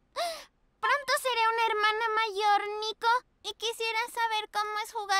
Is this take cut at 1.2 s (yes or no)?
no